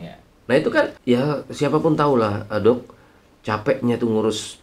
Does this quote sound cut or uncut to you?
cut